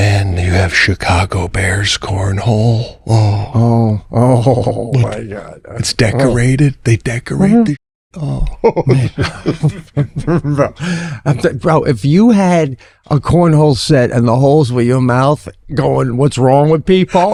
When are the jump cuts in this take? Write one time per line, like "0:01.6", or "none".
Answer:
none